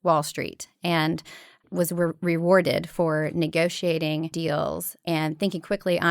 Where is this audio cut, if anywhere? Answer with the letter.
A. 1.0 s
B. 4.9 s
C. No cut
B